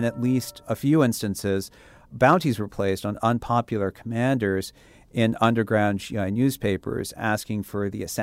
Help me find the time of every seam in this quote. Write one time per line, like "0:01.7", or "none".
none